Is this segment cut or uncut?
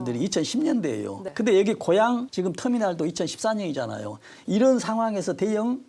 cut